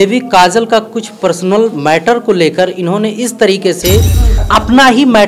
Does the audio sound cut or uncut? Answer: cut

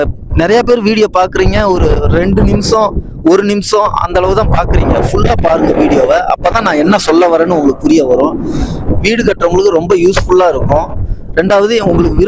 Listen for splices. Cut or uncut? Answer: uncut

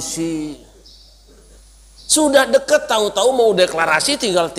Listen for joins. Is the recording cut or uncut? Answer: cut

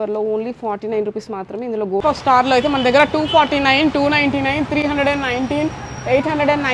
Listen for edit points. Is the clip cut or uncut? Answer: cut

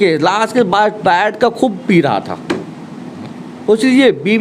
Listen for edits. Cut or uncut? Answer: uncut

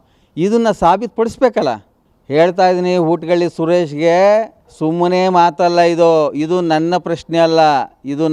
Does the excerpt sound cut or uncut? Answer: uncut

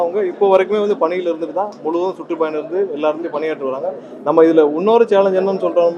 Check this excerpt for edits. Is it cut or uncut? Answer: uncut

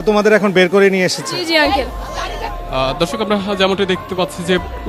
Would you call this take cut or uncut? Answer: cut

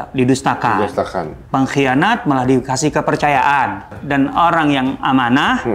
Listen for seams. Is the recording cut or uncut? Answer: cut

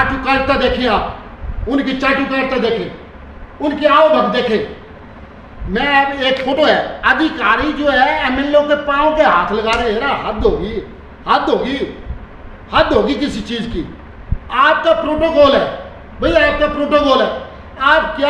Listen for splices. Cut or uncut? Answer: uncut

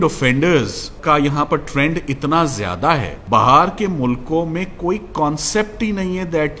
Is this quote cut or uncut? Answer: cut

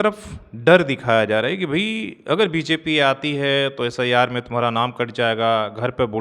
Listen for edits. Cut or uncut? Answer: uncut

